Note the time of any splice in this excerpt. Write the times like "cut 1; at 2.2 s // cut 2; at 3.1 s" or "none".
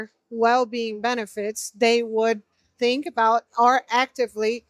none